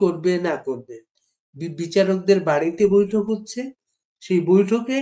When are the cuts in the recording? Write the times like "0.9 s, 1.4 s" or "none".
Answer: none